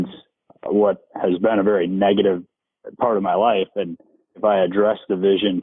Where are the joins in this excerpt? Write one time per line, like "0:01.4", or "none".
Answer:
0:04.3